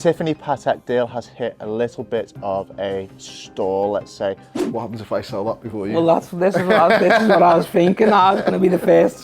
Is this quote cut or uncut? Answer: cut